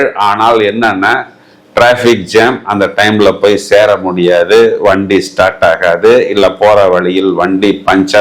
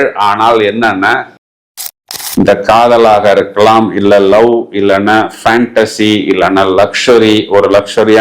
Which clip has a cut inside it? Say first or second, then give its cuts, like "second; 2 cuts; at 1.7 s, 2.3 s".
second; 1 cut; at 1.8 s